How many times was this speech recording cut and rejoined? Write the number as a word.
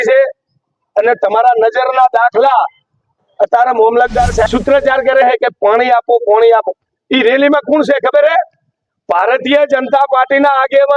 one